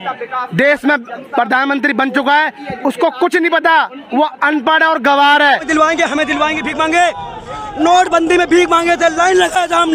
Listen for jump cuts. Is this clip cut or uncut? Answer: cut